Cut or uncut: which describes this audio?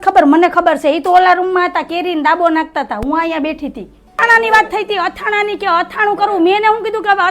cut